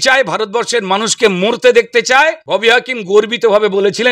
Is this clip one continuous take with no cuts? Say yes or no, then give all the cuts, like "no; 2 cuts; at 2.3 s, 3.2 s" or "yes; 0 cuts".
no; 1 cut; at 2.4 s